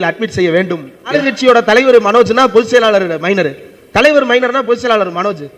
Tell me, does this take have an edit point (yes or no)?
yes